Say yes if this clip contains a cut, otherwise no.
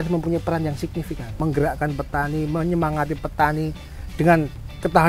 yes